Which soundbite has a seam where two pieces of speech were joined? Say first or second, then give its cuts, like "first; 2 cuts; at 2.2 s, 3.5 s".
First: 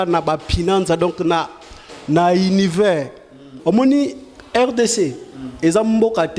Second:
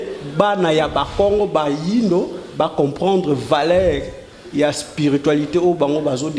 first; 1 cut; at 3.5 s